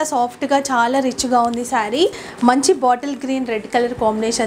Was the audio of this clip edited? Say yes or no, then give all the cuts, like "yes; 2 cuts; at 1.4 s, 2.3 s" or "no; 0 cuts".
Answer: yes; 1 cut; at 2.3 s